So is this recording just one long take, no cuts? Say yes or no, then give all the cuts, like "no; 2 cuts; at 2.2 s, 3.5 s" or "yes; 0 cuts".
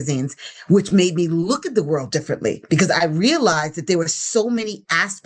yes; 0 cuts